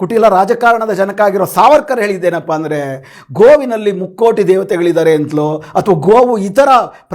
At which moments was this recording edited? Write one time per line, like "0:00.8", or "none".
none